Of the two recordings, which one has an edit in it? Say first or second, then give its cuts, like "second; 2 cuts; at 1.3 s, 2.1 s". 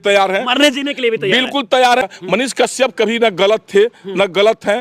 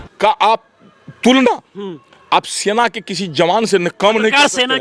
first; 1 cut; at 2.0 s